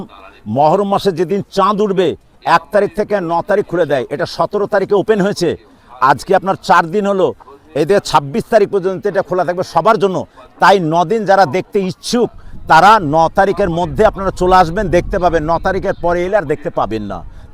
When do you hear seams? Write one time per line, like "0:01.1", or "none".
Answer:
none